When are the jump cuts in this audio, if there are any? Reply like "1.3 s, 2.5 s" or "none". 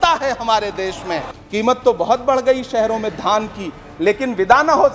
1.3 s